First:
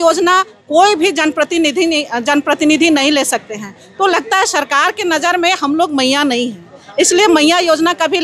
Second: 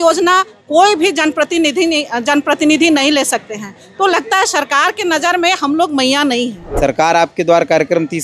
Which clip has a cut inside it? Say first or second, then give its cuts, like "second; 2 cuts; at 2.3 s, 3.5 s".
second; 1 cut; at 6.6 s